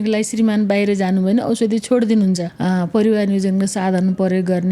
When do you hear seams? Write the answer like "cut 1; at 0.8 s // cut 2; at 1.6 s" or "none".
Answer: cut 1; at 2.5 s